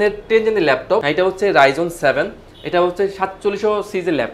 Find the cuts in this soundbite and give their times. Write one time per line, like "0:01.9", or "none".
0:01.0

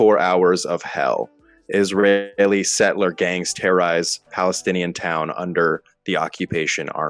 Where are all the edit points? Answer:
none

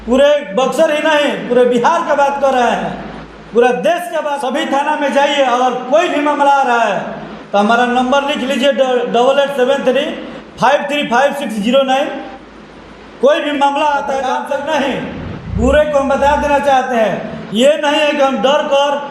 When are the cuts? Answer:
0:04.3
0:14.3

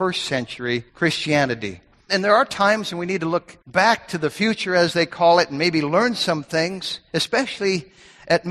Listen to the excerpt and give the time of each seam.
0:00.9
0:02.1
0:03.6

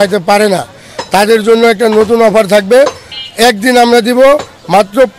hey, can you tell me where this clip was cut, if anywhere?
none

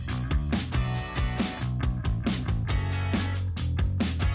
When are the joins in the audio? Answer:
0:02.0

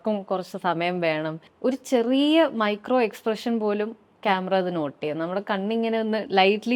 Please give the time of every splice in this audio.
0:01.4

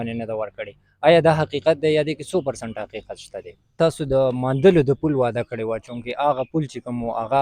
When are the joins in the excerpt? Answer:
0:03.7

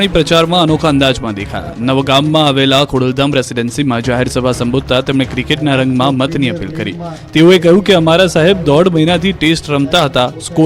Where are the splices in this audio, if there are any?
0:04.2

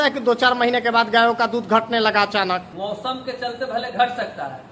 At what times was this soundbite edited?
0:02.7

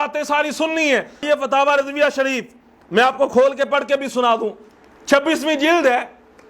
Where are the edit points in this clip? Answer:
0:01.2

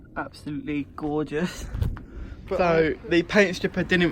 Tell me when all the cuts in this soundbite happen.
0:02.8

